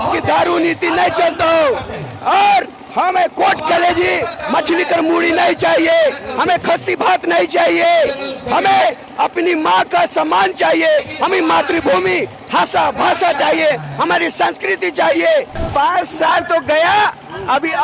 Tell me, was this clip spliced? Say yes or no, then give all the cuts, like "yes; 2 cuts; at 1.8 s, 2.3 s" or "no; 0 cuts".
yes; 1 cut; at 15.6 s